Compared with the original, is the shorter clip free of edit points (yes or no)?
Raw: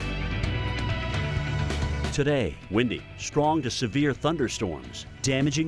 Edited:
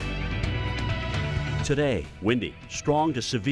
no